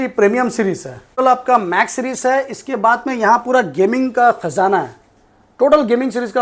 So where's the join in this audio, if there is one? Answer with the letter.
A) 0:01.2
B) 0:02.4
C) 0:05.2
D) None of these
A